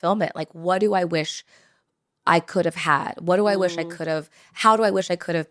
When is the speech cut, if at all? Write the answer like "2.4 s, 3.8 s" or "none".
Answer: none